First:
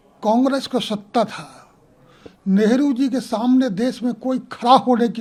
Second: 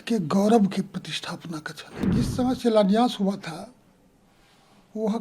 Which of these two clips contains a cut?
second; 1 cut; at 2.1 s

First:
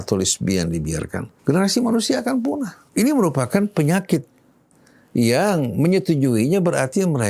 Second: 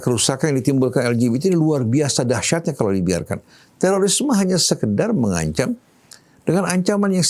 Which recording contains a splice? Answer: first; 2 cuts; at 1.2 s, 2.8 s

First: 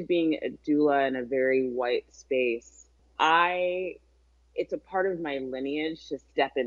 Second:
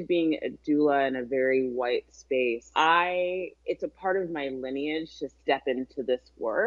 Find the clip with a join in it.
second; 2 cuts; at 2.6 s, 3.5 s

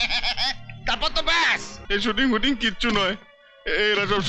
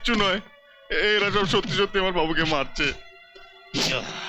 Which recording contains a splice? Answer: first; 1 cut; at 1.8 s

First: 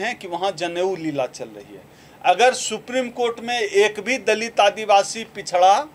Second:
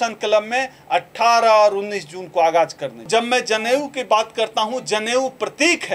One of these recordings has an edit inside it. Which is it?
second; 1 cut; at 3.1 s

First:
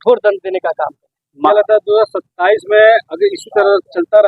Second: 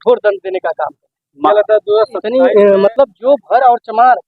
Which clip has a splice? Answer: second; 1 cut; at 2.2 s

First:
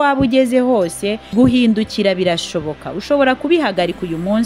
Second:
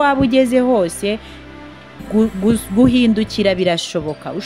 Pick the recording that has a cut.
first; 1 cut; at 1.3 s

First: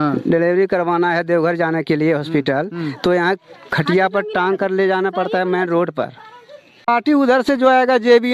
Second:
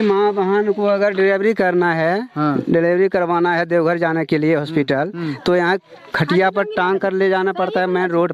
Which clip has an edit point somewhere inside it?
first; 1 cut; at 6.9 s

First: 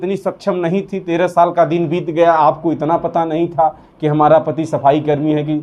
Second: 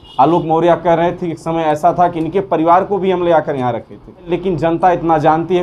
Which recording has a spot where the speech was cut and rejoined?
second; 1 cut; at 4.3 s

